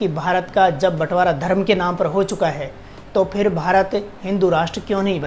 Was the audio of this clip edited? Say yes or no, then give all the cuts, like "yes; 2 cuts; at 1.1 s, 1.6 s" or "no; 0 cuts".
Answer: no; 0 cuts